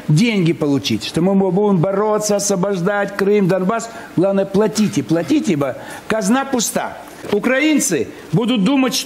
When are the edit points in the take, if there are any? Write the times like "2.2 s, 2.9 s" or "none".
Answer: 7.2 s